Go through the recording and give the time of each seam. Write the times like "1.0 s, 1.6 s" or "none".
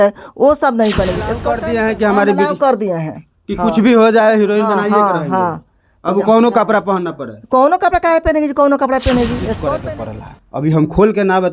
1.5 s, 9.7 s